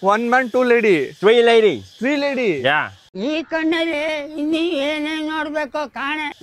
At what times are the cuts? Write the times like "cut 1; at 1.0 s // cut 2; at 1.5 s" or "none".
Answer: none